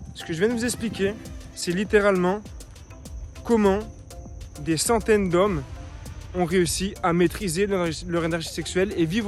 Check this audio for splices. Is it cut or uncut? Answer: uncut